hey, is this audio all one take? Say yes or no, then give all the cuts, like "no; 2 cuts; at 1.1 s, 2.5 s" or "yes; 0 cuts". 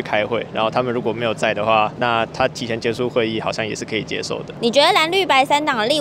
yes; 0 cuts